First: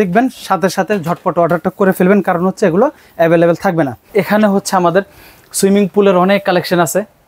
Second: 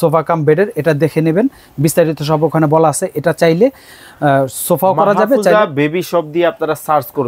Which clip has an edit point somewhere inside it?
first; 1 cut; at 4.1 s

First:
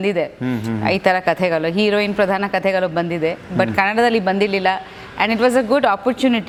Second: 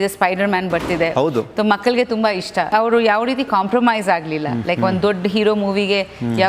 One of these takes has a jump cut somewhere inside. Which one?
second; 1 cut; at 2.7 s

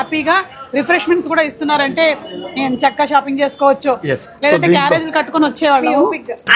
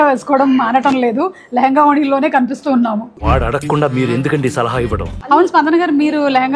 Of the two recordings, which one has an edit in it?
second; 2 cuts; at 3.1 s, 5.1 s

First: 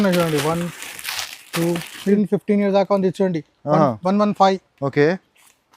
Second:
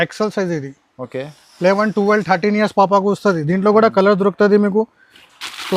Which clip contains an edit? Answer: first; 1 cut; at 2.2 s

